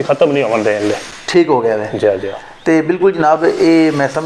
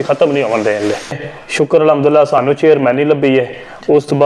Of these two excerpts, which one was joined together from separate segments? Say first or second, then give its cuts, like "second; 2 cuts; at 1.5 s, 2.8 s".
second; 1 cut; at 1.2 s